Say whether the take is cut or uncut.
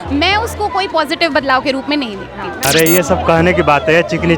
cut